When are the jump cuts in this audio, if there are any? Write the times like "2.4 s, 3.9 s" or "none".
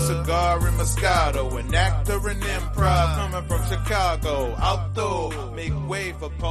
none

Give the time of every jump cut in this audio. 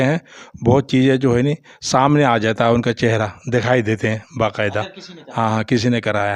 none

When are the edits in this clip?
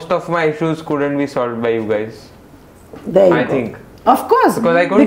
none

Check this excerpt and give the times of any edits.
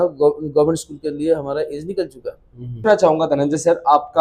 2.9 s

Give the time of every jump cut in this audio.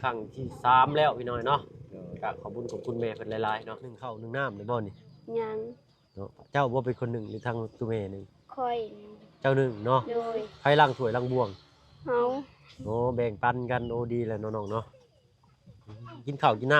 4.1 s

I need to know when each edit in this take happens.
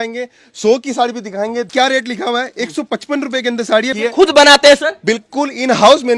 1.7 s, 3.9 s

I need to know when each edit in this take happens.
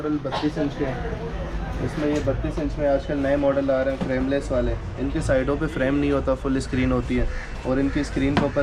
none

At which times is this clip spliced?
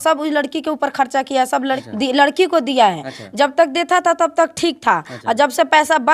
1.8 s

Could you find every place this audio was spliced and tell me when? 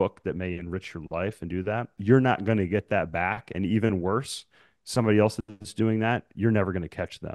1.9 s

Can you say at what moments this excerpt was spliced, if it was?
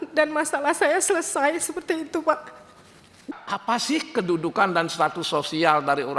3.4 s

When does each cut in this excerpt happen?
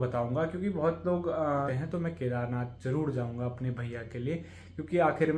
1.7 s

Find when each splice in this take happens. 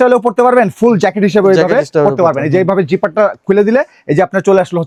none

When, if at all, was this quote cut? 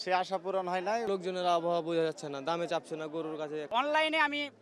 1.1 s, 3.7 s

